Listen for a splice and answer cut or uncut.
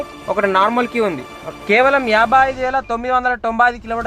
cut